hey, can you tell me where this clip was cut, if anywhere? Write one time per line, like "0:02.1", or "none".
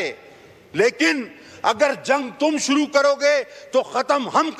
none